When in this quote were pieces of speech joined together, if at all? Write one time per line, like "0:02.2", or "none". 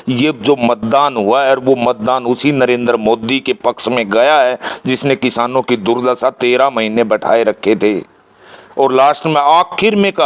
none